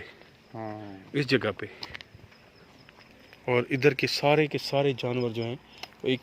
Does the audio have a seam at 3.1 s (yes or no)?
yes